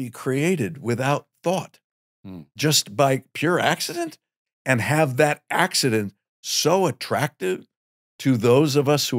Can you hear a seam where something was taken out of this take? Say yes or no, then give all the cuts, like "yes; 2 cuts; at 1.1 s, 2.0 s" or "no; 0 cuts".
no; 0 cuts